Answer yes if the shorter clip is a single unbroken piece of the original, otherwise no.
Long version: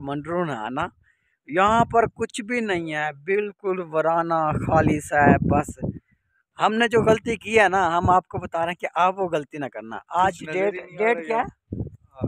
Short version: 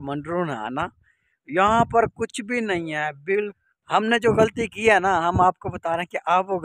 no